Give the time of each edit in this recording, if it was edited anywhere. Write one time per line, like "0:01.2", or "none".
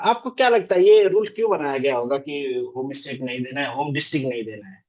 none